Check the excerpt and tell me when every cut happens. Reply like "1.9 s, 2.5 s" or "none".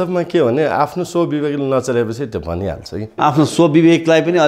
3.2 s